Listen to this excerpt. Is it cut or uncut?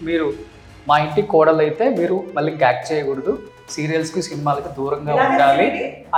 uncut